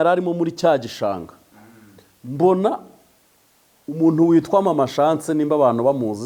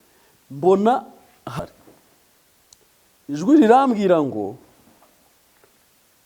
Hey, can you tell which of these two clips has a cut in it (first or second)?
second